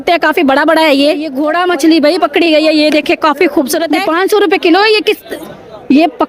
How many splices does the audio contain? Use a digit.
2